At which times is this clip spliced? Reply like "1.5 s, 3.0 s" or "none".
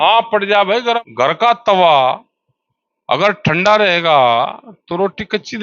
1.0 s